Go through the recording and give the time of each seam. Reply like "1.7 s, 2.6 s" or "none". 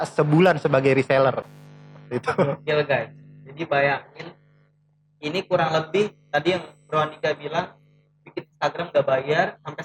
none